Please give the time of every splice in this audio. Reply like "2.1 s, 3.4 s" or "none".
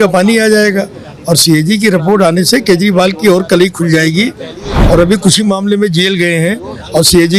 none